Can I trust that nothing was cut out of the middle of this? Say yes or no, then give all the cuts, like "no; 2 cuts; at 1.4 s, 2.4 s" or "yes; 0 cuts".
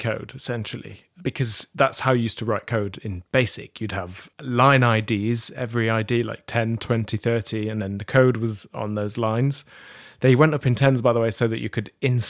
no; 1 cut; at 4.2 s